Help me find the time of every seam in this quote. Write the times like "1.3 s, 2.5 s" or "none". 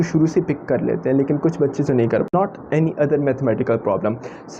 2.3 s